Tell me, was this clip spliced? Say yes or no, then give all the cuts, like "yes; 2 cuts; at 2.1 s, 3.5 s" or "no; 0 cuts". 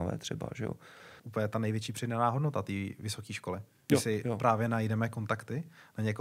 yes; 1 cut; at 1.2 s